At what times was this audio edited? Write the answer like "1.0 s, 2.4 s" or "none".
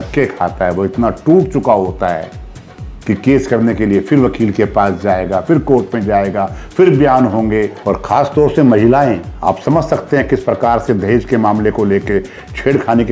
7.8 s